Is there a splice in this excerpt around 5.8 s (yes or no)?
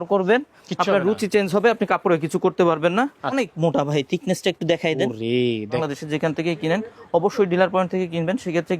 yes